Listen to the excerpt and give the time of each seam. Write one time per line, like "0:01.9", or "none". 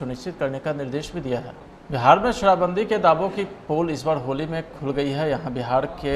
0:01.8